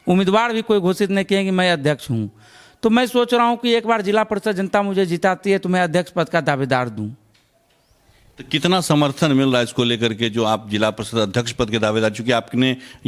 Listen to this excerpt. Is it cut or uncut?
uncut